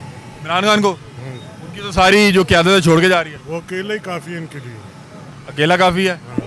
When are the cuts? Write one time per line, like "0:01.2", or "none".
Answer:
none